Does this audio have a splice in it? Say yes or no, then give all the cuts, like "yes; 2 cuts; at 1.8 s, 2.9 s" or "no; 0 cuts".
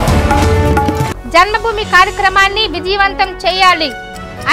yes; 1 cut; at 1.1 s